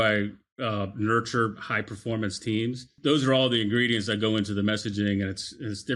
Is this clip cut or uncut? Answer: cut